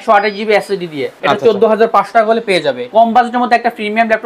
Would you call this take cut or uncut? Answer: cut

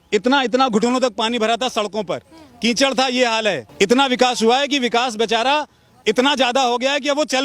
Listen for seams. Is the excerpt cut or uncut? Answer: cut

